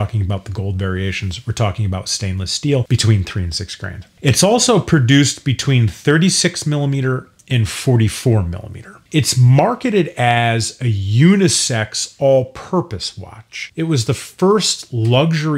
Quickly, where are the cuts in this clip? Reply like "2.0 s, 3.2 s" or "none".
13.6 s